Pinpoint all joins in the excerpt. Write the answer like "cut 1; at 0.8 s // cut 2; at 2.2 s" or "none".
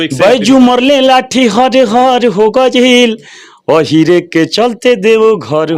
none